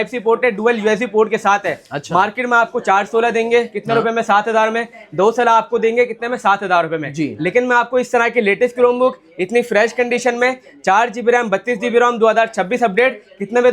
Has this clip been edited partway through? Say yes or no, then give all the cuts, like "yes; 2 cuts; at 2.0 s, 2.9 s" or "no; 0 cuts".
no; 0 cuts